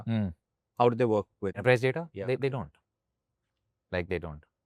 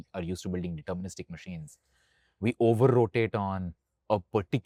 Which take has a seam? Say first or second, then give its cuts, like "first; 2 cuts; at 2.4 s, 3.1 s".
first; 1 cut; at 1.6 s